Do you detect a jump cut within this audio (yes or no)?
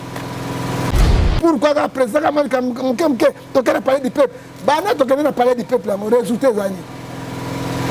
yes